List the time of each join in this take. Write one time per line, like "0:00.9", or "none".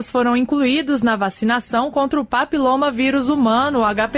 none

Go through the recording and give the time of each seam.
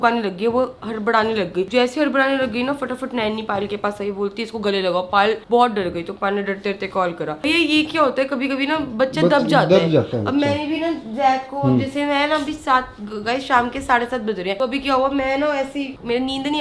none

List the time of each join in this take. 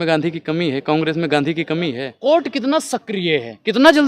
0:02.1

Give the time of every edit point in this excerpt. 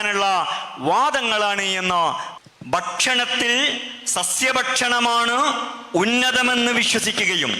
0:02.3

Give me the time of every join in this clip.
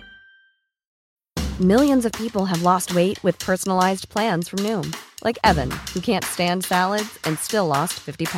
0:00.9

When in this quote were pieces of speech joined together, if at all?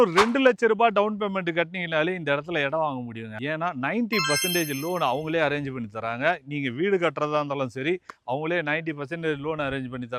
none

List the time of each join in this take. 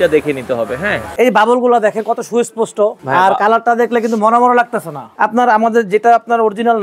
0:01.0
0:03.0
0:05.0

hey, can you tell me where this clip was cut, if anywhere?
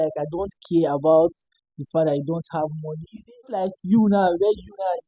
0:03.5

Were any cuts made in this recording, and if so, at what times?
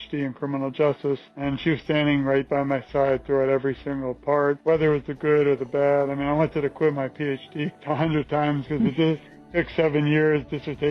0:01.3
0:04.6
0:07.8

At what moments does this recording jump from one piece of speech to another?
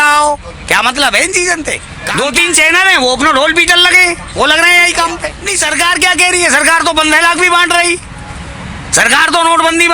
0:01.9
0:05.4

